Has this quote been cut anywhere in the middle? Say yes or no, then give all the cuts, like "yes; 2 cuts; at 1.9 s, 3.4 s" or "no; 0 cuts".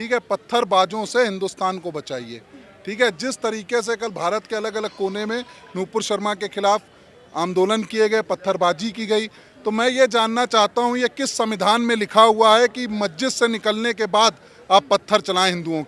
no; 0 cuts